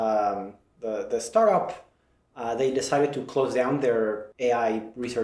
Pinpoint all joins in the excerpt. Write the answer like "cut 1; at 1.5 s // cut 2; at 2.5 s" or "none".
cut 1; at 4.3 s